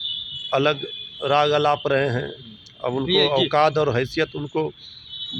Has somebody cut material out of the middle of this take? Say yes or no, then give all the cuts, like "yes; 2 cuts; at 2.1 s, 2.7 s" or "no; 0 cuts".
no; 0 cuts